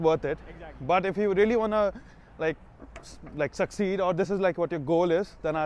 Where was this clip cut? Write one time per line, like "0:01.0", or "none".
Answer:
none